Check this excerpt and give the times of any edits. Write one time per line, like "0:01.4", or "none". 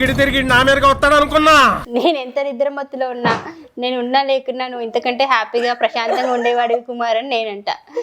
0:01.8